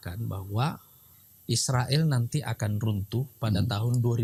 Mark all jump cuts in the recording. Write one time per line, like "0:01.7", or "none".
none